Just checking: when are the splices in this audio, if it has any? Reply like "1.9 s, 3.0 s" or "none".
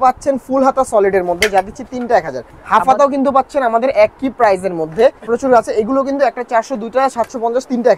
2.4 s, 5.2 s